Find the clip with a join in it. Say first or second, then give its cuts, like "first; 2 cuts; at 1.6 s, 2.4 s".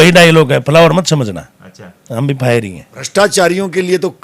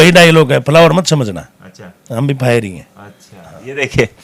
first; 1 cut; at 3.0 s